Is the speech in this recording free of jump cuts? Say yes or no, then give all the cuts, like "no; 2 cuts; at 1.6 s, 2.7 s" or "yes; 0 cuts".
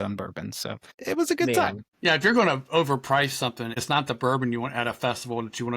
no; 3 cuts; at 0.9 s, 1.9 s, 3.8 s